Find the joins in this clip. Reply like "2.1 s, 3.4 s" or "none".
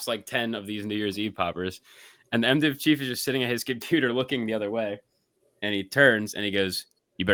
none